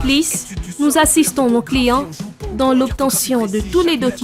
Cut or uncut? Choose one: uncut